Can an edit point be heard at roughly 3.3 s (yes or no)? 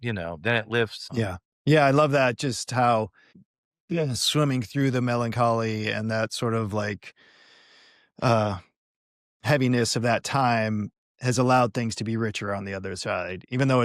yes